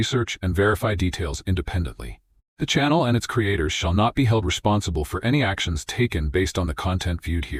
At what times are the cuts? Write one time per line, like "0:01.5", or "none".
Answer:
none

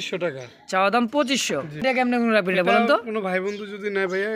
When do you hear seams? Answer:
0:01.8

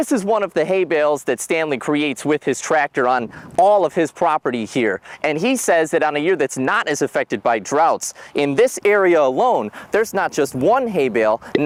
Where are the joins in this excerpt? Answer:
none

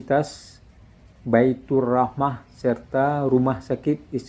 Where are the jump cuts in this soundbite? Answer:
none

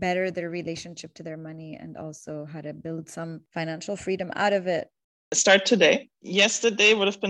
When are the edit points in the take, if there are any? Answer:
0:05.3
0:06.2

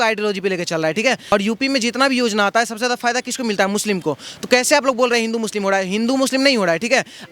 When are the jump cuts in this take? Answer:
0:01.3

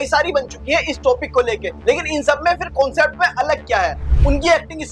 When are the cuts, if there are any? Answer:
0:01.7
0:04.1

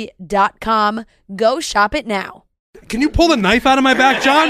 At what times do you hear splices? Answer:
0:02.8

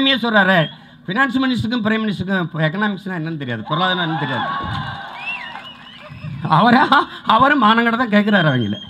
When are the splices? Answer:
none

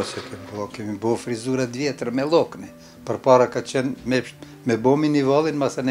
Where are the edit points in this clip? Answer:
none

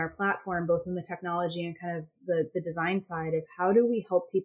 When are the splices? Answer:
none

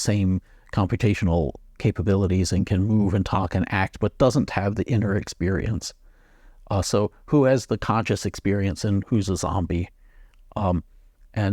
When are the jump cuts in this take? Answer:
none

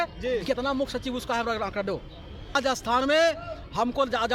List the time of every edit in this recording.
0:02.5

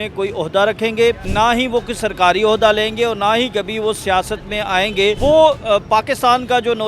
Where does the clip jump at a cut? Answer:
0:01.2
0:05.2

